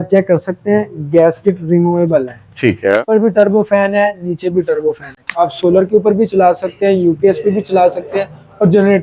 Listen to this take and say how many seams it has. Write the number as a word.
two